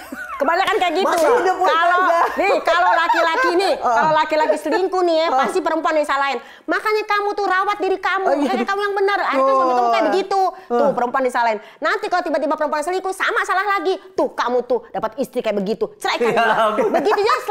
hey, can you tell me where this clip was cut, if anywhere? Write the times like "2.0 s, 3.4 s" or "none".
none